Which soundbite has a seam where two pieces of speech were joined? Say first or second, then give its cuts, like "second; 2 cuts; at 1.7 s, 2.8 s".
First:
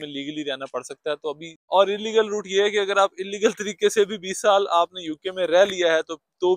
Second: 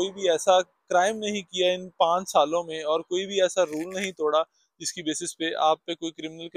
first; 1 cut; at 1.6 s